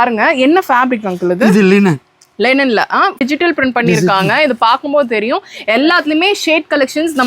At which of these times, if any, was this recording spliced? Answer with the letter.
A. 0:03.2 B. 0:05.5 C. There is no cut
A